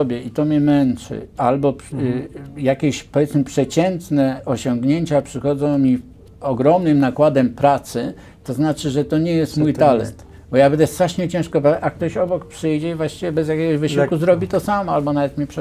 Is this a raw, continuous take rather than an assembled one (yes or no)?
yes